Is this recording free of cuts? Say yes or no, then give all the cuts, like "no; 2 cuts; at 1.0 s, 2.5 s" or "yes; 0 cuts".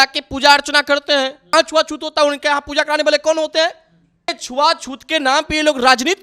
no; 2 cuts; at 1.5 s, 4.4 s